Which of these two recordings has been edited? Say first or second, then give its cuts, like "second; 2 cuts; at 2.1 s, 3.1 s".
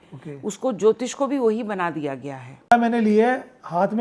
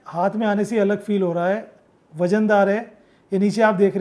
first; 1 cut; at 2.6 s